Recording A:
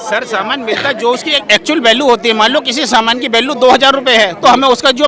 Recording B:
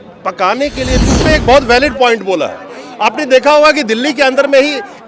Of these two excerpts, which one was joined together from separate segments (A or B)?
B